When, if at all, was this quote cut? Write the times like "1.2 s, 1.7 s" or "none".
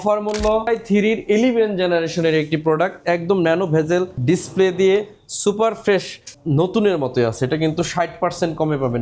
0.7 s, 4.1 s, 6.4 s